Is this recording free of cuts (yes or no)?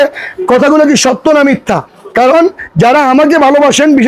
yes